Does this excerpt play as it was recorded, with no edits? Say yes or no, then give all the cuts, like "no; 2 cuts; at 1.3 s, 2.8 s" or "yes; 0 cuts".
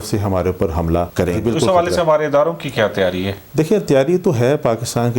no; 1 cut; at 1.4 s